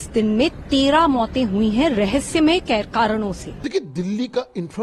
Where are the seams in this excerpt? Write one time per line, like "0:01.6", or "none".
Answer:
0:03.6